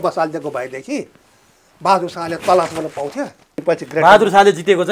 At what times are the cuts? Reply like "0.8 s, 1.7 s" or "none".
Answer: 3.6 s